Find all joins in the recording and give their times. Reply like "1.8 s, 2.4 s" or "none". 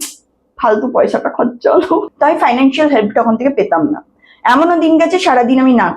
2.1 s